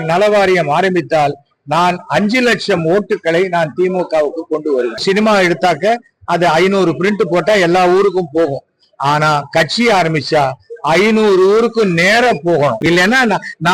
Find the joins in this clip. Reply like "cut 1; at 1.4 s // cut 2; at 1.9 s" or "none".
cut 1; at 5.0 s // cut 2; at 12.8 s